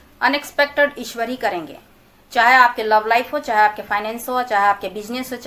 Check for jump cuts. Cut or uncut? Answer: uncut